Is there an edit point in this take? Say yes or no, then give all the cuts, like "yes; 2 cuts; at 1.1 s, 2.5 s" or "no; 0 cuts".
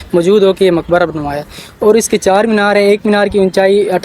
no; 0 cuts